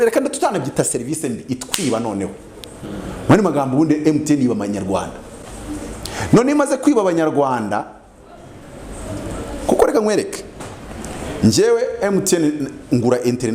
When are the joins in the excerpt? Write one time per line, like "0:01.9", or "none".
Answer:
none